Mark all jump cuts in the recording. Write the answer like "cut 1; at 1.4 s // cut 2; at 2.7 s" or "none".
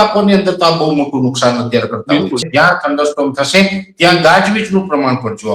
cut 1; at 2.4 s